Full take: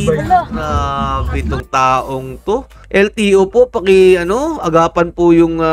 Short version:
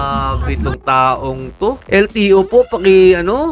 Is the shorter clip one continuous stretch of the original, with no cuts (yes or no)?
no